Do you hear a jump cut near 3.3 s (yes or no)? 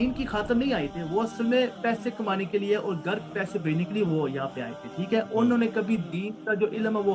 no